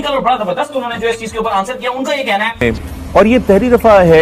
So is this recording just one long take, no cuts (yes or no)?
no